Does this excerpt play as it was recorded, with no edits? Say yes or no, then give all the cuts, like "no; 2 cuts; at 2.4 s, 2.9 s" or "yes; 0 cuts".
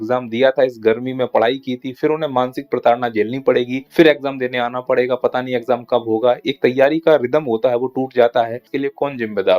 no; 2 cuts; at 3.8 s, 8.7 s